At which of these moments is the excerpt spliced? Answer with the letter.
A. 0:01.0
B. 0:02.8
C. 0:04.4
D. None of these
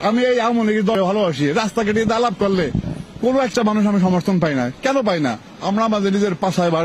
A